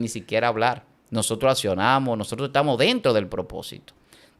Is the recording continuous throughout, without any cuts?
no; 1 cut; at 0.9 s

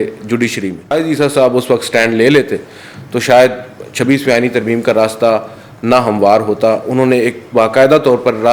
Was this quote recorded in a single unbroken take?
no; 1 cut; at 0.9 s

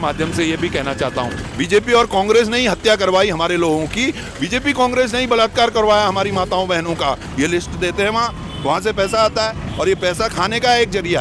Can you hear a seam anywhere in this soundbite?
yes; 2 cuts; at 1.4 s, 7.3 s

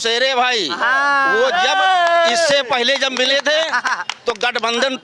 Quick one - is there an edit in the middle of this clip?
no; 0 cuts

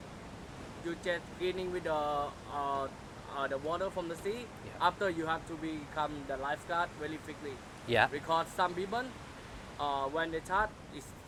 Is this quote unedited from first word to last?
yes; 0 cuts

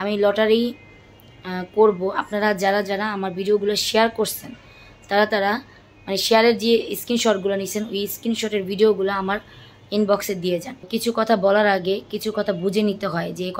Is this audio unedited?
no; 1 cut; at 10.8 s

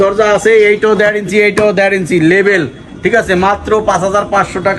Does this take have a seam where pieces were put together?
no; 0 cuts

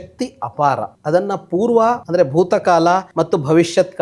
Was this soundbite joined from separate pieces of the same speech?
yes; 3 cuts; at 0.9 s, 2.0 s, 3.1 s

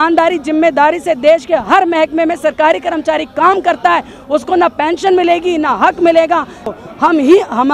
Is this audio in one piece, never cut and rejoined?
no; 1 cut; at 6.7 s

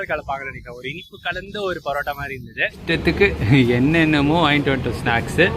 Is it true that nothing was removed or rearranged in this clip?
no; 1 cut; at 2.8 s

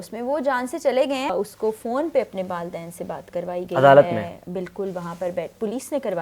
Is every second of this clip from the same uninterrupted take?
no; 1 cut; at 1.3 s

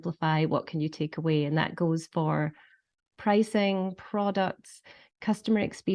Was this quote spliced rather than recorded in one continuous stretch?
no; 0 cuts

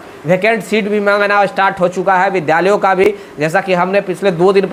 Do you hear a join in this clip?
no; 0 cuts

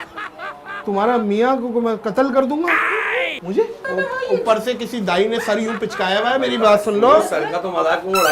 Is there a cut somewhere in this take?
yes; 1 cut; at 3.8 s

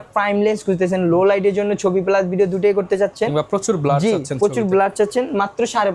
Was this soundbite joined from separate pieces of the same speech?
no; 0 cuts

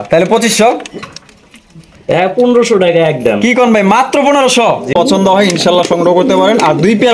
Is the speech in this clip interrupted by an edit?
yes; 1 cut; at 4.9 s

